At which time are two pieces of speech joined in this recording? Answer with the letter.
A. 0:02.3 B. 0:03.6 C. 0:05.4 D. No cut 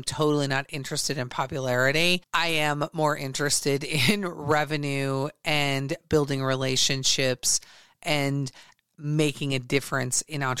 D